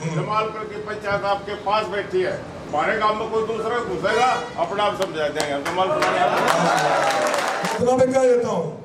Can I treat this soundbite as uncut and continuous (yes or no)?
no